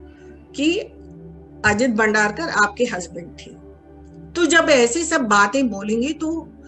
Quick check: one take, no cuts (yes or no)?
yes